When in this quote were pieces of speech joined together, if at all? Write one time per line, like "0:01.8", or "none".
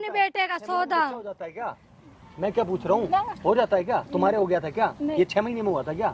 none